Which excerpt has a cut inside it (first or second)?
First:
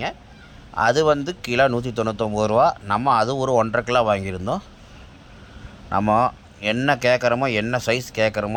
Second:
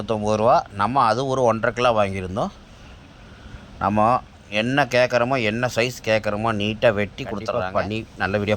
second